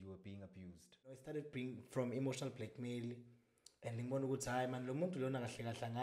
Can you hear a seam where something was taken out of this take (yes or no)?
yes